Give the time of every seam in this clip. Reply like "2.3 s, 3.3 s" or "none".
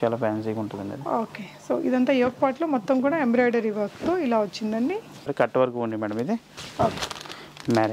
5.3 s

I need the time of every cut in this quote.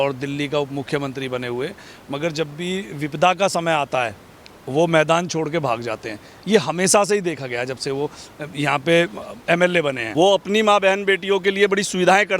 10.0 s

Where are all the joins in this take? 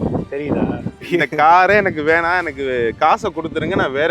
1.0 s

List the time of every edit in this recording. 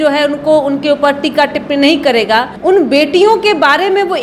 2.5 s

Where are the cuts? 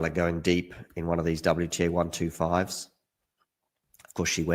none

